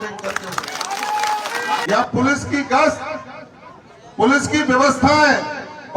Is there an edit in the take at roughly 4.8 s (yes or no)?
no